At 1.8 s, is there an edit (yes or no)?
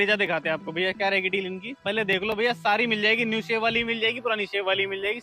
yes